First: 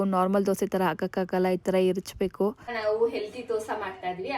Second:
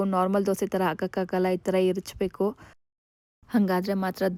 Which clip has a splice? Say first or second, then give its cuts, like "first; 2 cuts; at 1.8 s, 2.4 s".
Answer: first; 1 cut; at 2.8 s